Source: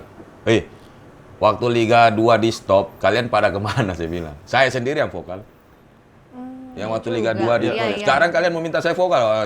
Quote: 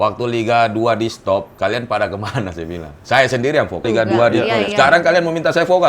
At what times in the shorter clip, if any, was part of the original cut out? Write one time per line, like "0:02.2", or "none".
0:03.8